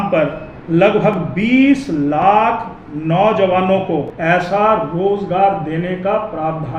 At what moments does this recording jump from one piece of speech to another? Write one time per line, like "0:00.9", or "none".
0:04.1